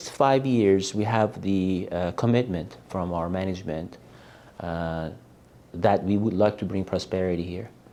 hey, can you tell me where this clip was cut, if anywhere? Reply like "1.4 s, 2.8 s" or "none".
none